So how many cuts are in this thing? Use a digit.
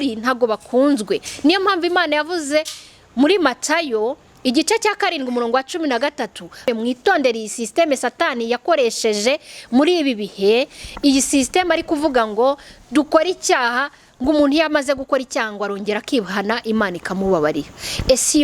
1